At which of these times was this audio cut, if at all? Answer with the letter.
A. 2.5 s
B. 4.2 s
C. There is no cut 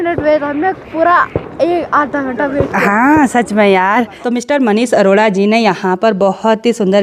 B